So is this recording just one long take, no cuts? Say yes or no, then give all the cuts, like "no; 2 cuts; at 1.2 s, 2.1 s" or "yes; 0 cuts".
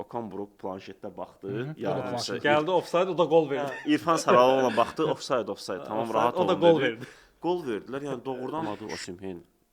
no; 1 cut; at 8.7 s